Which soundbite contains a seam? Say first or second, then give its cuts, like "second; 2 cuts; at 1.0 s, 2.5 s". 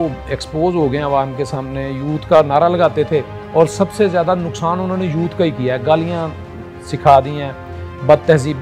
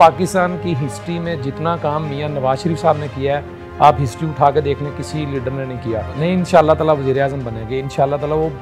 second; 1 cut; at 6.1 s